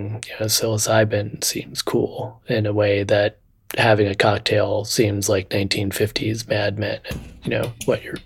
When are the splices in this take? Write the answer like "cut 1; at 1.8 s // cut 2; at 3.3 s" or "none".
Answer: none